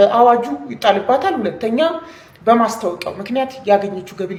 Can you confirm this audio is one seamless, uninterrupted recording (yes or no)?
yes